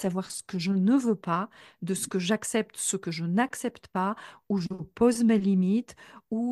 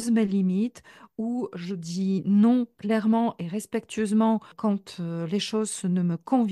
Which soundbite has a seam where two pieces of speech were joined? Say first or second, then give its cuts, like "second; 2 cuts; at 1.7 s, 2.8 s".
second; 2 cuts; at 2.8 s, 4.5 s